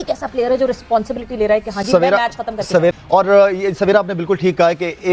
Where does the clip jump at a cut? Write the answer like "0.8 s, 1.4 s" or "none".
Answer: none

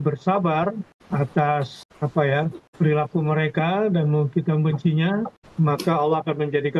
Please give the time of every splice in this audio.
0.9 s, 1.8 s, 2.6 s, 5.4 s

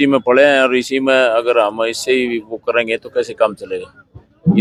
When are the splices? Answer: none

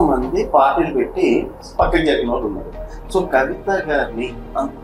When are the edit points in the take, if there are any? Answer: none

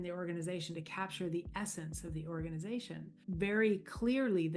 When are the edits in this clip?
3.2 s

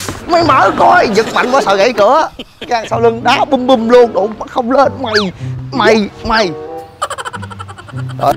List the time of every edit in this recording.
2.6 s

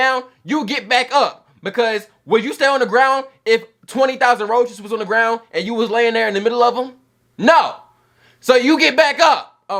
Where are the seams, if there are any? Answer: none

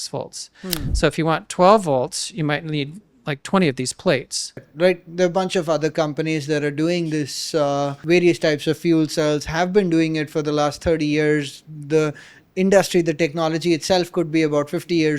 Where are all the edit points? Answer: 4.7 s, 8.0 s

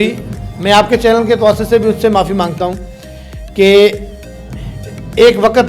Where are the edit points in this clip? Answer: none

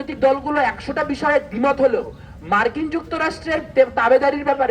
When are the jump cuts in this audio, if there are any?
none

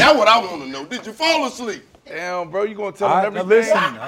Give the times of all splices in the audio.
none

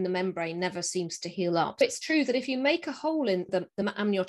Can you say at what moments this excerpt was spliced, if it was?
1.8 s, 3.5 s

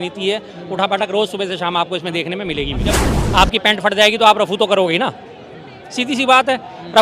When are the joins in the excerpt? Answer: 3.1 s

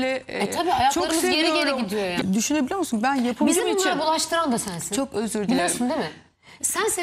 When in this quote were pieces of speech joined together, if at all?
2.2 s

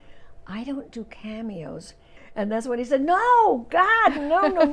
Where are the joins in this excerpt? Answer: 2.4 s

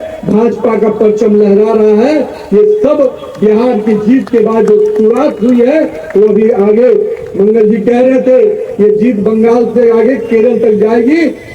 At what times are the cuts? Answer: none

